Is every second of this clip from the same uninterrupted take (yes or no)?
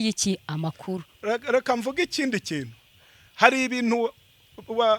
yes